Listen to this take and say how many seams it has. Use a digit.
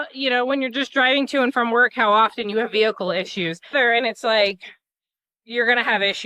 1